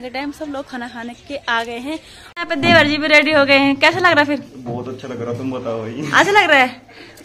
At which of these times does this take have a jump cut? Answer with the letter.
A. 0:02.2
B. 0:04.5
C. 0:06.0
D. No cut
A